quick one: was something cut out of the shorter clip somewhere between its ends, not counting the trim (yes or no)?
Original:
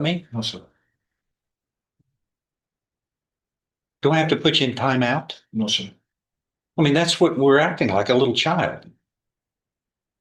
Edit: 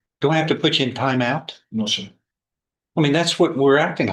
no